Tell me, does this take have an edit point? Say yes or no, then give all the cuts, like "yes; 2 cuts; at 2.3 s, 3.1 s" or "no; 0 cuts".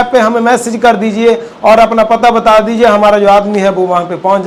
no; 0 cuts